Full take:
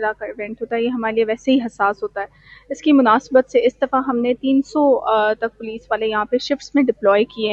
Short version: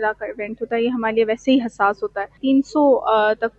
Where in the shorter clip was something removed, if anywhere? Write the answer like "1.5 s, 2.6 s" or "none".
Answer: 2.4 s